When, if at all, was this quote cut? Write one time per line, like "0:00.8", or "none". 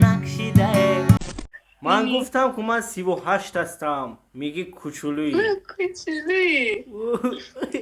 0:01.3